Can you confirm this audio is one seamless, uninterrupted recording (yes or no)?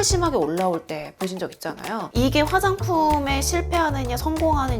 no